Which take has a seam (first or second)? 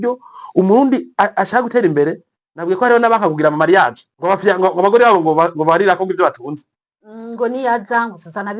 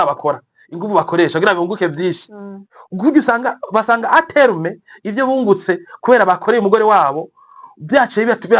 first